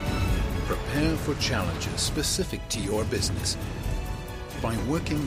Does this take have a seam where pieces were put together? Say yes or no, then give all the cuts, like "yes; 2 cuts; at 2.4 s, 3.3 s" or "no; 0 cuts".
no; 0 cuts